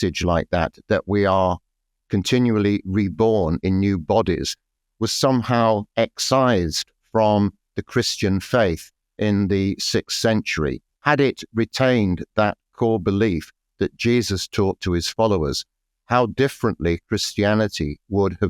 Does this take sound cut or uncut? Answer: cut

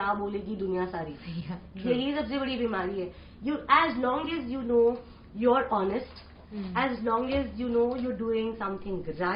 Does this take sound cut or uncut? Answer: uncut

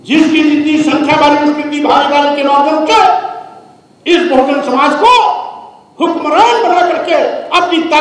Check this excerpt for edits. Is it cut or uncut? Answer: uncut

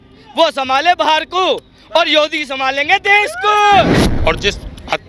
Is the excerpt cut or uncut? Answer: cut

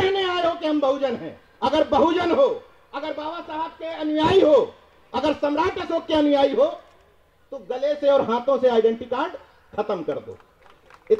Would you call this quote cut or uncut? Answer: uncut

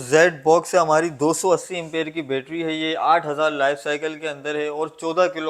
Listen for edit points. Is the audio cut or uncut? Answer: uncut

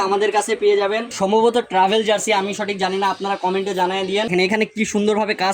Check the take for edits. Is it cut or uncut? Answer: cut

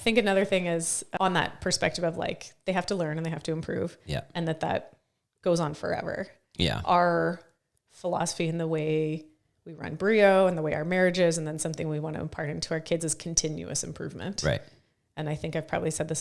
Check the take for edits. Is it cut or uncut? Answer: cut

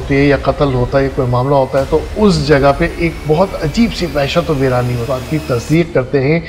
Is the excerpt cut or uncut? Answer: cut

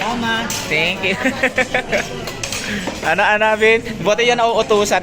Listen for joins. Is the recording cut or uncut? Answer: uncut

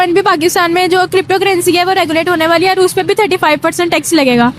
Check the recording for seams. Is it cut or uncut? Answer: uncut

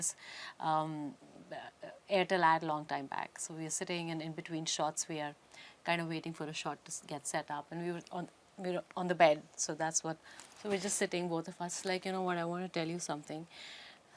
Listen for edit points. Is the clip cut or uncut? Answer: uncut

